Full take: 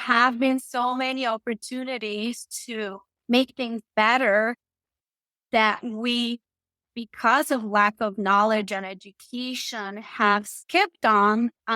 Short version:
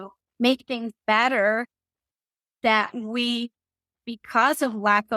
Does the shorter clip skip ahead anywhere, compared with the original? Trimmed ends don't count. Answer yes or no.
no